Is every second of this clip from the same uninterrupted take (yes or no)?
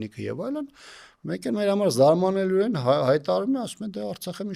yes